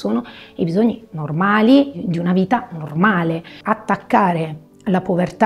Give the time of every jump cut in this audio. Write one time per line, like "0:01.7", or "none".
0:03.6